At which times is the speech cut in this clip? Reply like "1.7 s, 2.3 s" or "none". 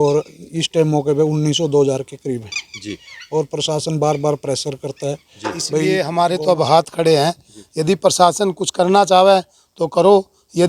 5.8 s